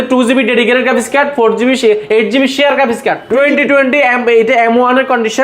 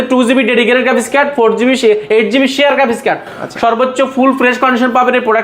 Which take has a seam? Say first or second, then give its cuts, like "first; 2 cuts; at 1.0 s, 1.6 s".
first; 1 cut; at 3.2 s